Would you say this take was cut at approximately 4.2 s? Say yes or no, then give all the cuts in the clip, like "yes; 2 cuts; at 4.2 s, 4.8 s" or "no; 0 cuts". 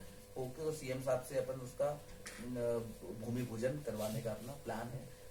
no; 0 cuts